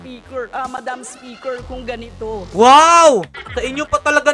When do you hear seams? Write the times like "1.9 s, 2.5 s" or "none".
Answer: 2.5 s, 3.4 s